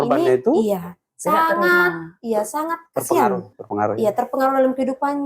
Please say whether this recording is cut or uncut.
uncut